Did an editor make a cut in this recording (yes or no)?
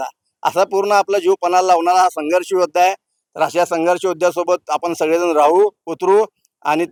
no